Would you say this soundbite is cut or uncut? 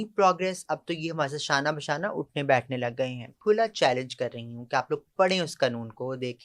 cut